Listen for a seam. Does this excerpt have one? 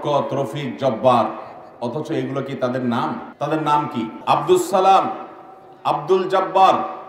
yes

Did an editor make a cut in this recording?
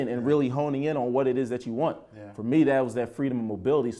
no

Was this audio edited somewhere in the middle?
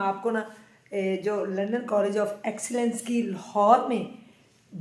no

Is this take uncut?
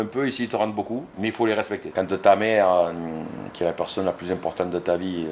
no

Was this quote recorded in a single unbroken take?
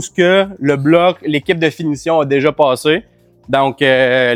yes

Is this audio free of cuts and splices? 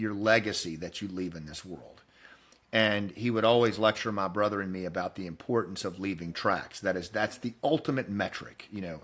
yes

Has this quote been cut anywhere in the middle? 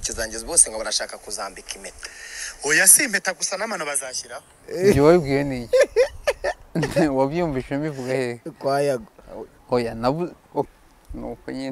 yes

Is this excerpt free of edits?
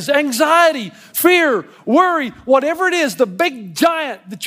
yes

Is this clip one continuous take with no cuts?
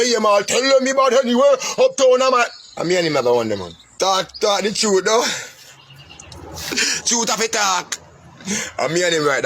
no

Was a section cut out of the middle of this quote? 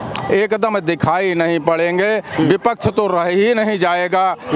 no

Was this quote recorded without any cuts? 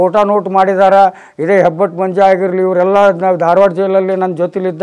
yes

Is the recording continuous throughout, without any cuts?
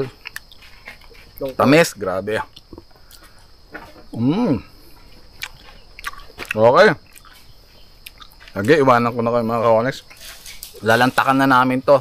yes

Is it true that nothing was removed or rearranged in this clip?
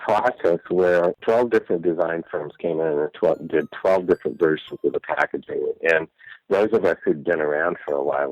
no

